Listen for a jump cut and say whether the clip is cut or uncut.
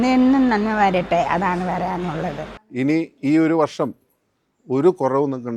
cut